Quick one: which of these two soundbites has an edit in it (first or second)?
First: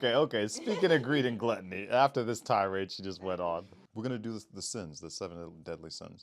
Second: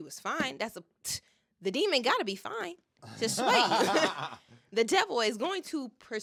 first